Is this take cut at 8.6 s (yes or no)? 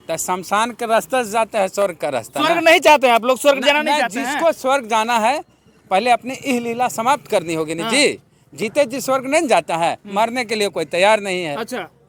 no